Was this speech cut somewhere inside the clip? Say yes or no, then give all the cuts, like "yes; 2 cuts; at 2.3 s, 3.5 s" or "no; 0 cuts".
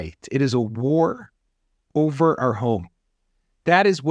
no; 0 cuts